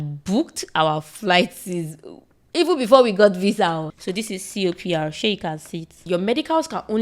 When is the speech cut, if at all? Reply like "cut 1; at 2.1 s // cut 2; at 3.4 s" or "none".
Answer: cut 1; at 3.9 s // cut 2; at 6.0 s